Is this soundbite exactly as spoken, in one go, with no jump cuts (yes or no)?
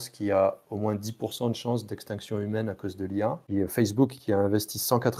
no